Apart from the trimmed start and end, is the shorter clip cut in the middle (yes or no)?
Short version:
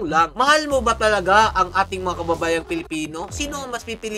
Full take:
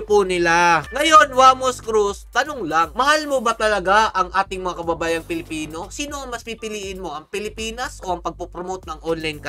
no